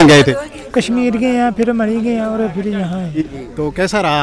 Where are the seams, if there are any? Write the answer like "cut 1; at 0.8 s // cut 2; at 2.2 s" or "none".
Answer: none